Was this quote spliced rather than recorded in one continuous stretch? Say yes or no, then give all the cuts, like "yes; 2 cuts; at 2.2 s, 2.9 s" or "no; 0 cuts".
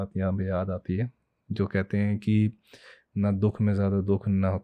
no; 0 cuts